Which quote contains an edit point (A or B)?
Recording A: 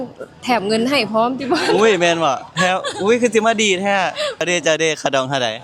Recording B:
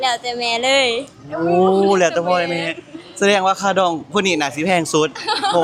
A